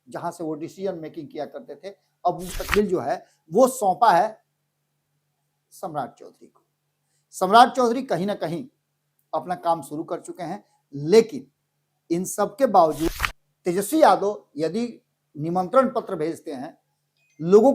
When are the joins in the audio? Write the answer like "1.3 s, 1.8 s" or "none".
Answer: 2.5 s, 13.1 s